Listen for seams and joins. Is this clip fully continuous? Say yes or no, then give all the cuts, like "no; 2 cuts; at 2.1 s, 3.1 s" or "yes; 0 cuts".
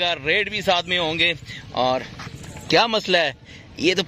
yes; 0 cuts